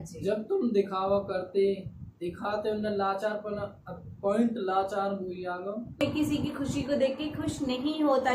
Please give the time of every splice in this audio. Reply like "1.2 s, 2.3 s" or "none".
6.0 s

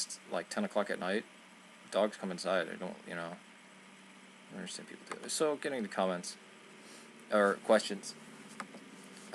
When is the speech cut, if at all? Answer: 2.2 s

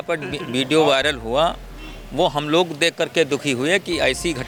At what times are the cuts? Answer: none

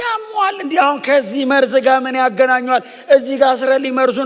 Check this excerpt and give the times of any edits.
none

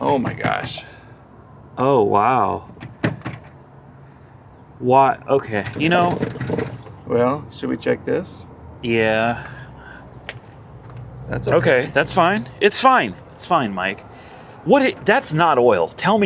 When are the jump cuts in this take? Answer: none

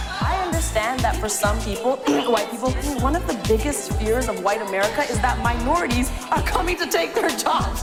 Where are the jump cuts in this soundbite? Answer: none

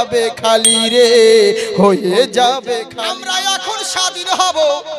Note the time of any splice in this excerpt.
2.9 s

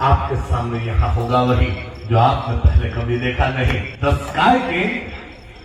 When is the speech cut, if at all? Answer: 3.9 s

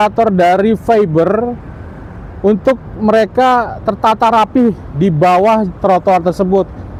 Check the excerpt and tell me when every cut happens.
none

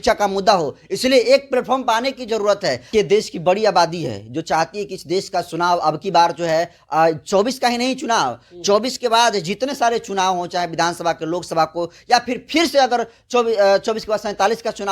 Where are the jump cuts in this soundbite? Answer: 2.9 s

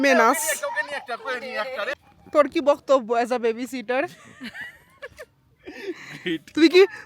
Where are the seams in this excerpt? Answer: 1.9 s

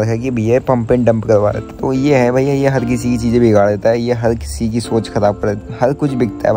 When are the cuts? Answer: 1.6 s, 5.6 s

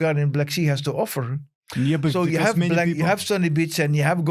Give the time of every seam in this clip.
none

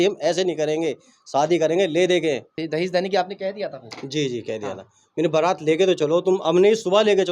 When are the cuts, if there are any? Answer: 2.5 s

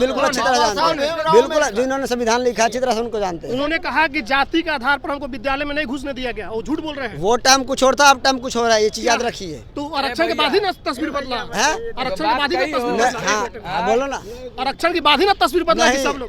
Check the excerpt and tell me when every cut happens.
none

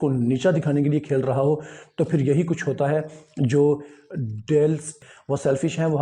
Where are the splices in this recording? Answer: 4.9 s

